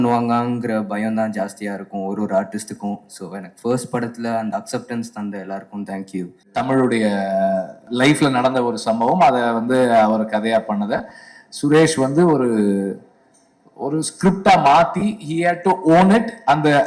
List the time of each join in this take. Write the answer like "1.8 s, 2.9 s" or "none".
6.5 s, 7.8 s